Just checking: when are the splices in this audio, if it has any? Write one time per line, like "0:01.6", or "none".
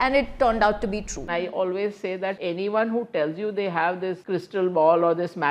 0:01.3
0:02.4
0:04.2